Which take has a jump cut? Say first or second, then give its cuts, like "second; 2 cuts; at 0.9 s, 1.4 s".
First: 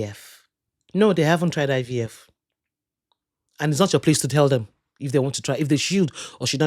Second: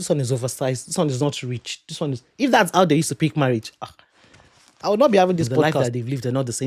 second; 1 cut; at 5.6 s